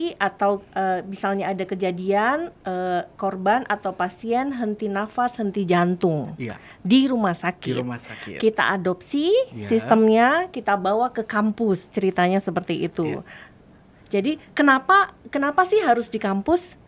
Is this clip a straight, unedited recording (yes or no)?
yes